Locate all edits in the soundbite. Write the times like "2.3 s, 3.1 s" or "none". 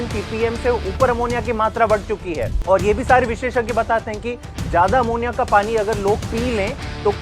2.5 s